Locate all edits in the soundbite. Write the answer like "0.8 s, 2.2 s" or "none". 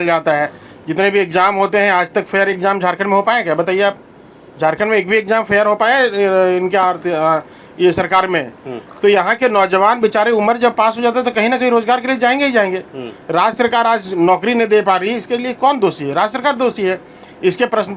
none